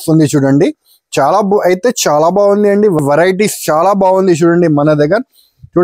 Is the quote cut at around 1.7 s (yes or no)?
no